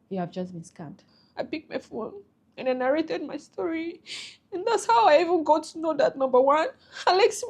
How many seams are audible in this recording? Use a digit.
1